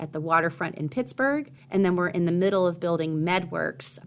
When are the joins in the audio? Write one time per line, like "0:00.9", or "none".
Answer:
0:01.6